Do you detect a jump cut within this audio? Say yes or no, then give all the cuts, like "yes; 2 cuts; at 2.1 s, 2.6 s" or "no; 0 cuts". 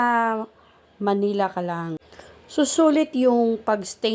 yes; 1 cut; at 2.0 s